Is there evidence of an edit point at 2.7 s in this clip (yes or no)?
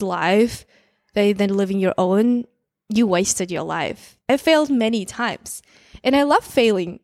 no